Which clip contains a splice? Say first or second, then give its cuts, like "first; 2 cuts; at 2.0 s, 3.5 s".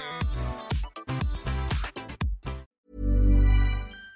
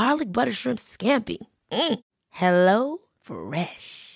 first; 1 cut; at 2.7 s